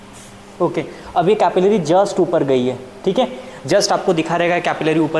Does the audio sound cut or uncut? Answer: uncut